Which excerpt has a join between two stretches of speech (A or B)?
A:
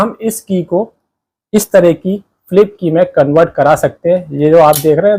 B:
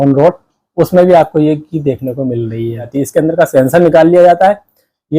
B